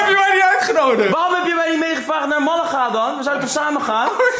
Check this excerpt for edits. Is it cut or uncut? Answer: uncut